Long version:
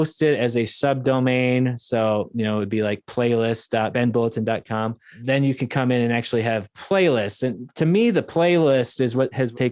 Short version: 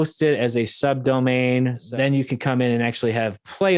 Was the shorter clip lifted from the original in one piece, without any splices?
no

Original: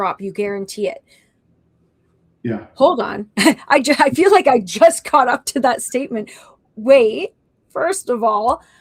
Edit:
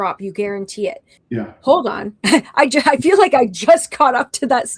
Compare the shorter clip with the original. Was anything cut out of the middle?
yes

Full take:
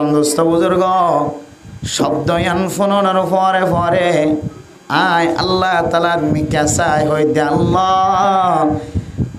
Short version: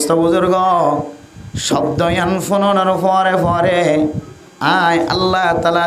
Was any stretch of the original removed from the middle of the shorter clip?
no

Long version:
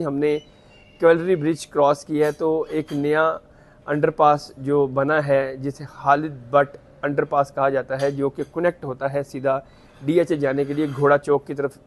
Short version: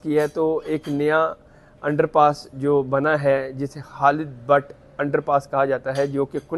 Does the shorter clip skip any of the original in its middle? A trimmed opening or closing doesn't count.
no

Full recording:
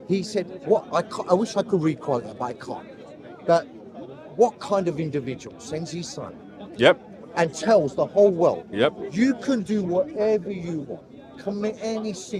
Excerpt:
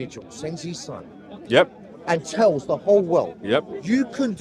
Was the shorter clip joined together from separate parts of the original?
no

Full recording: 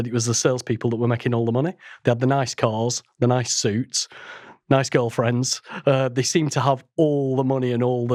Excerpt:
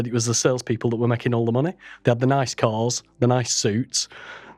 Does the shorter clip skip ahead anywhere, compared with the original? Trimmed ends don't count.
no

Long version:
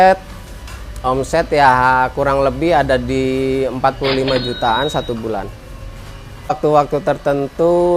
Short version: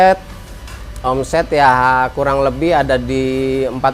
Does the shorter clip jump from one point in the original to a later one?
no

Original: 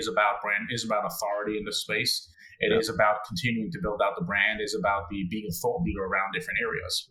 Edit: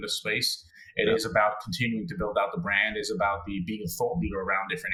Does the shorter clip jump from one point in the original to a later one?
no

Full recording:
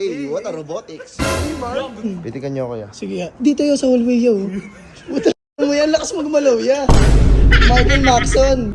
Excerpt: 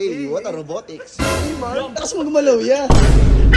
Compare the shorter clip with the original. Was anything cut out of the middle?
yes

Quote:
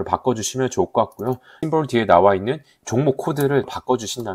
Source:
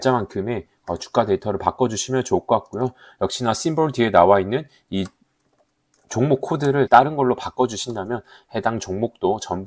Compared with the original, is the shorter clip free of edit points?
no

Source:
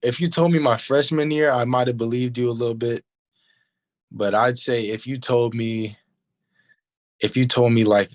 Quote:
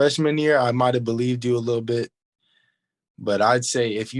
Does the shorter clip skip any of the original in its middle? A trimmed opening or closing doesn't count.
no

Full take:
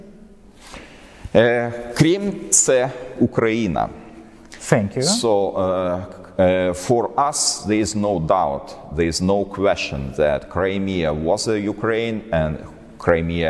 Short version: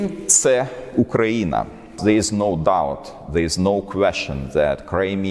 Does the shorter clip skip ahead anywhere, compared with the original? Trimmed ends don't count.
yes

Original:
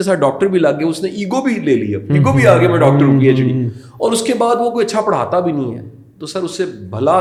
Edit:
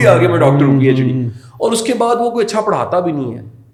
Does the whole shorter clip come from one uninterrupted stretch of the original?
yes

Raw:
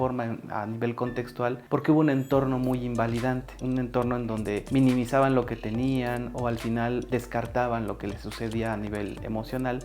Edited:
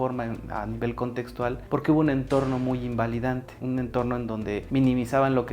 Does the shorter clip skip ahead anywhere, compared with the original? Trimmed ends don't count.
no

